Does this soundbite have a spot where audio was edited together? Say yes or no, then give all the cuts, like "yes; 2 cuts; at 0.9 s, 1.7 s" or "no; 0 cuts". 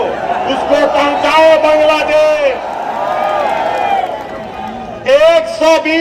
yes; 1 cut; at 2.9 s